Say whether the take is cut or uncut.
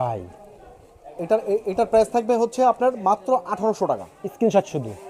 uncut